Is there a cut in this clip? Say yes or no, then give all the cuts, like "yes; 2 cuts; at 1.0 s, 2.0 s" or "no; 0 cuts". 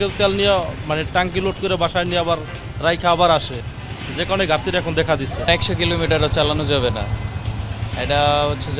yes; 1 cut; at 5.4 s